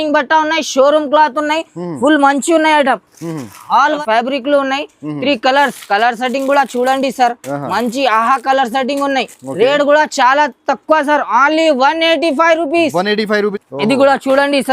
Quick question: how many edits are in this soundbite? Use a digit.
2